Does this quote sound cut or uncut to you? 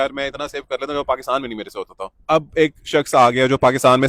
cut